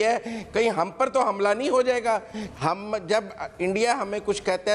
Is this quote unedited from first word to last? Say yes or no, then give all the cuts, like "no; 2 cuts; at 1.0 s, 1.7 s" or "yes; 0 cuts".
no; 1 cut; at 2.4 s